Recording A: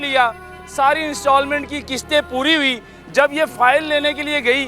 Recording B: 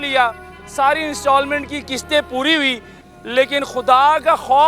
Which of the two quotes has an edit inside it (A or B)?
B